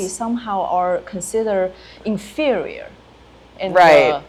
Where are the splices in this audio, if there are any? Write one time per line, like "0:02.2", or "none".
none